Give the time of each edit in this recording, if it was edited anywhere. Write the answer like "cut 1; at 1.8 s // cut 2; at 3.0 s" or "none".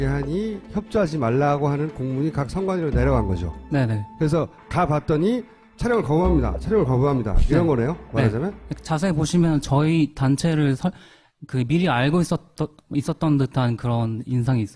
cut 1; at 6.8 s